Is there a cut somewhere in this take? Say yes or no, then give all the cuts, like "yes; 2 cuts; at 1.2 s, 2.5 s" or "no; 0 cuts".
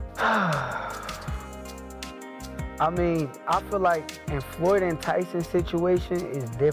no; 0 cuts